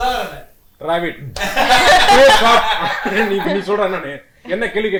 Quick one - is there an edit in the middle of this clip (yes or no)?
no